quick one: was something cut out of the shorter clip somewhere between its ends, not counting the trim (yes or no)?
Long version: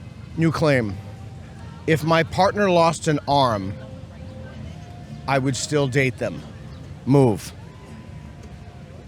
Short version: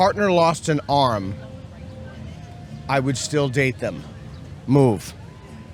no